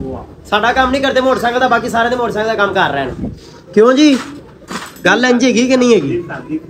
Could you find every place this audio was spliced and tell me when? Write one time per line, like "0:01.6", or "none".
none